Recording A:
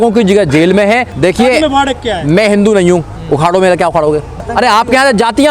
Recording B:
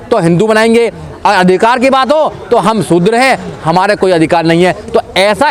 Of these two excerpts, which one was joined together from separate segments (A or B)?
A